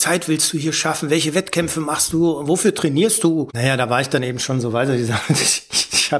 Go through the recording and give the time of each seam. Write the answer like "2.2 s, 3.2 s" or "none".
3.5 s